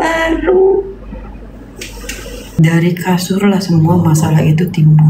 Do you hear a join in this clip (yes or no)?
yes